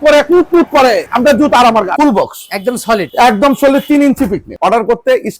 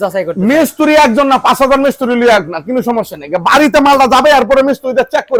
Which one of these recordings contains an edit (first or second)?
first